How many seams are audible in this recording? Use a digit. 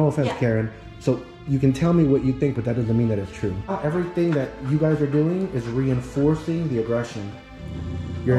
1